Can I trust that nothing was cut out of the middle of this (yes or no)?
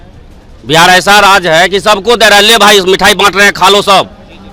yes